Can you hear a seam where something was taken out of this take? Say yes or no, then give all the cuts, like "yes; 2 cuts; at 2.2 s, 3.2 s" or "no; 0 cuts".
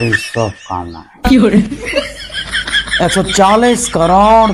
no; 0 cuts